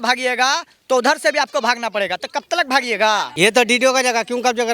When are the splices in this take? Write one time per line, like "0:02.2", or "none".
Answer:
0:03.3